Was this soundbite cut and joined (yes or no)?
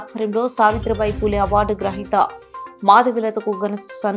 no